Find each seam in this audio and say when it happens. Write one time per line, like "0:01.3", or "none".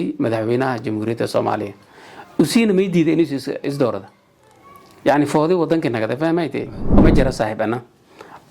0:07.0